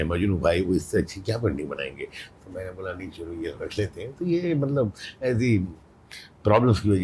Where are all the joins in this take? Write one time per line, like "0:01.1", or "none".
none